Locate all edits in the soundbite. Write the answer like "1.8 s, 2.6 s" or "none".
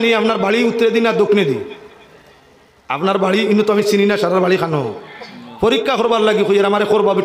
none